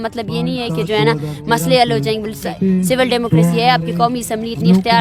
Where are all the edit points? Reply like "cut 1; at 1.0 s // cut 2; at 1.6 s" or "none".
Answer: cut 1; at 2.5 s